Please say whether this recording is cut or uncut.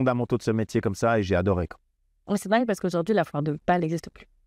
uncut